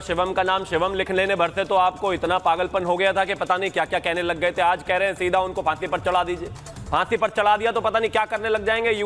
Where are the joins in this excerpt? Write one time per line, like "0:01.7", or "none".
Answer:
none